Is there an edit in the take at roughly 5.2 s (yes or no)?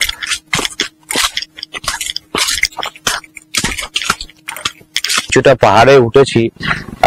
yes